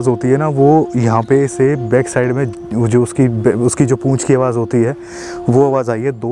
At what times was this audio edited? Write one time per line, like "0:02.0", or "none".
none